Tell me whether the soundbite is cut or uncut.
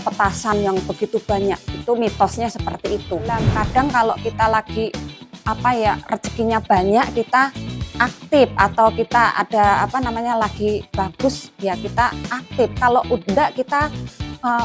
cut